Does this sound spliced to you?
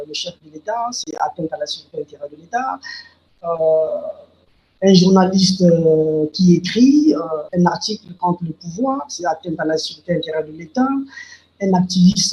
no; 0 cuts

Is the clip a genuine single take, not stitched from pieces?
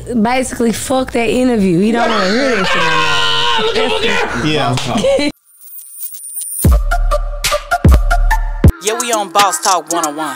no; 1 cut; at 5.4 s

